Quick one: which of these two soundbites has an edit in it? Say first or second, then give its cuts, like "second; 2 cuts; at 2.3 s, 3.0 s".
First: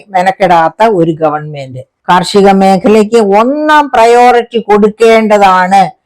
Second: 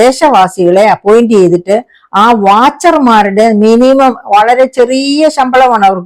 first; 1 cut; at 1.9 s